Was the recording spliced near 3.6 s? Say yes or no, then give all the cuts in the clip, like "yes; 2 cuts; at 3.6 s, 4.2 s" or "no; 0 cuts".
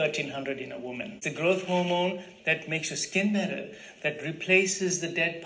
no; 1 cut; at 1.2 s